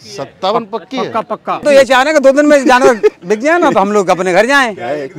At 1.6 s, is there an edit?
yes; 1 cut; at 1.6 s

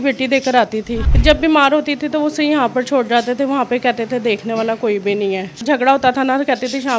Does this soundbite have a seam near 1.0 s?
yes; 2 cuts; at 1.0 s, 5.6 s

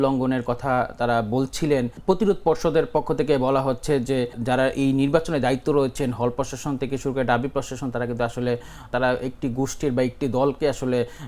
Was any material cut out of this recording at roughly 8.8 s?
yes; 3 cuts; at 2.0 s, 4.4 s, 8.8 s

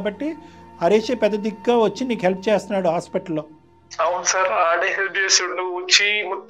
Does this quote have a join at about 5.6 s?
no; 0 cuts

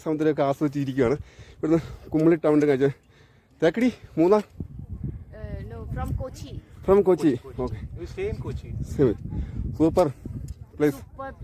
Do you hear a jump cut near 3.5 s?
no; 0 cuts

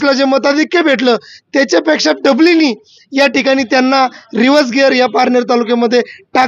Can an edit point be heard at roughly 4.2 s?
no; 0 cuts

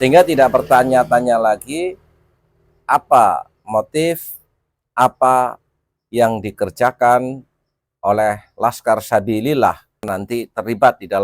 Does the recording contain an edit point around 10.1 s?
yes; 1 cut; at 10.1 s

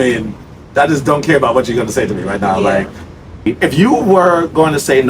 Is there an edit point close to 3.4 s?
yes; 1 cut; at 3.4 s

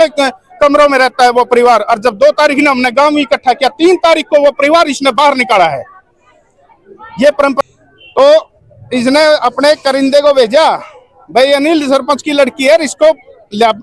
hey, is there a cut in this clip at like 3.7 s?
no; 1 cut; at 7.6 s

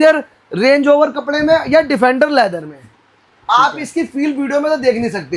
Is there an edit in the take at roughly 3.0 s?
no; 0 cuts

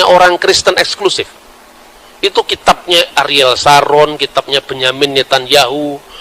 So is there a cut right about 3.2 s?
no; 0 cuts

